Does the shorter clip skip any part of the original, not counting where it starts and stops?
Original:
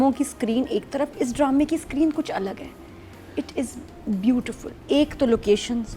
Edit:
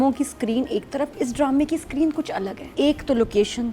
yes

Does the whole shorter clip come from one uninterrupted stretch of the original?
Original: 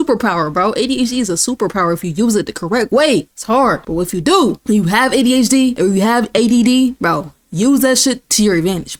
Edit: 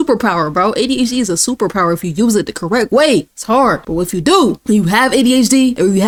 yes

